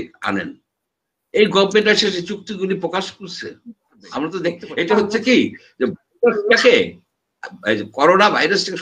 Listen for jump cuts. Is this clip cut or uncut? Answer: cut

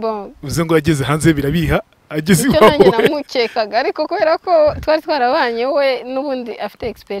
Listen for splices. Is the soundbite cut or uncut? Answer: uncut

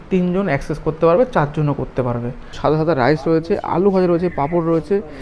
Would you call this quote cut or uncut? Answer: cut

